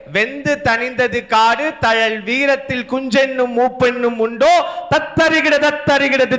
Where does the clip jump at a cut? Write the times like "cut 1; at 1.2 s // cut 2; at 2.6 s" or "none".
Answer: none